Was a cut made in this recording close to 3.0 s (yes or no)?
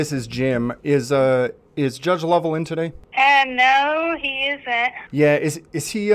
yes